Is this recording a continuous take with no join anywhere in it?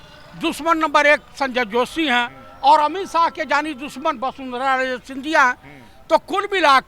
yes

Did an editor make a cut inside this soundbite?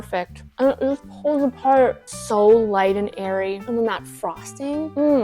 yes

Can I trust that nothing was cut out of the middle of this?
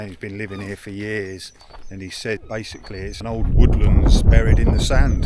no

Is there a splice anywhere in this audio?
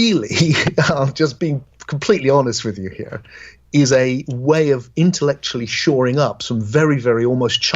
yes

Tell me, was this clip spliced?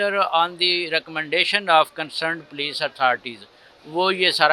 no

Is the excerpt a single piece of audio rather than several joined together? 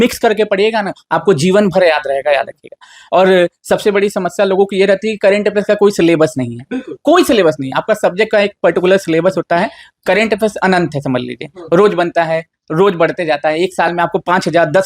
yes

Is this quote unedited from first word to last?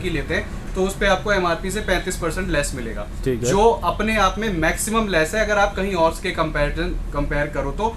yes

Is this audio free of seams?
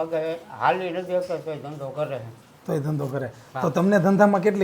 yes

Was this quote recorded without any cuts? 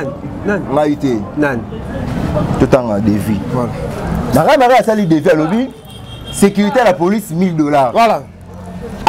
yes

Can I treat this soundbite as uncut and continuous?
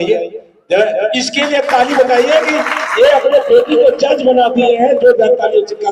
yes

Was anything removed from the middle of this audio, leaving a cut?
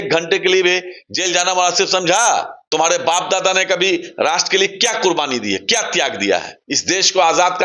yes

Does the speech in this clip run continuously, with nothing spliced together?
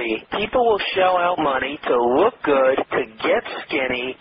yes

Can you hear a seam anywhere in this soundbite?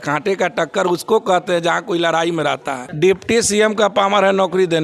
yes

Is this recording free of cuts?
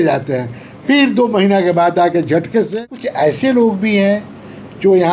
no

